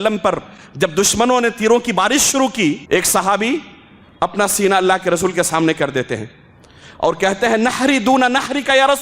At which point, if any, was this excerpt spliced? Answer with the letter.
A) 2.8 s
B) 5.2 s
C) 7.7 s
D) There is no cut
A